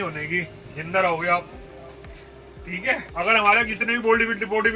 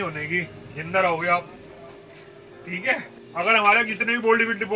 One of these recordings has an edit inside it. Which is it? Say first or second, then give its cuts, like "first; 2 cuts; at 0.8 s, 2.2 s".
first; 1 cut; at 3.1 s